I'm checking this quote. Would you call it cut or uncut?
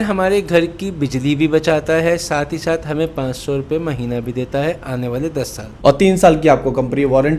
cut